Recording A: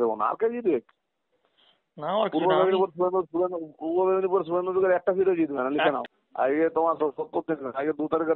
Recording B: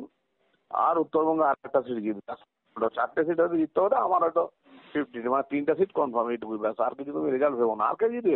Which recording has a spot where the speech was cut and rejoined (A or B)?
A